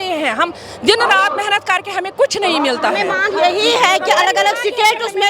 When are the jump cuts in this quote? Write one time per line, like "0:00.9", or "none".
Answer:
none